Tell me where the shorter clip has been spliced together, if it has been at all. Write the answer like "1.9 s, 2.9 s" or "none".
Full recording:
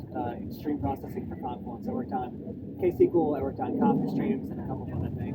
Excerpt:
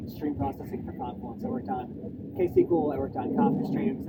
none